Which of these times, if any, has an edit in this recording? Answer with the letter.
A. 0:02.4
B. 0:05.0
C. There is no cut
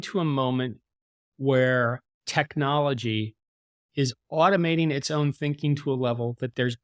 C